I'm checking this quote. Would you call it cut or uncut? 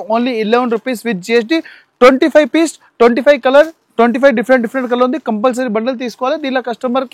uncut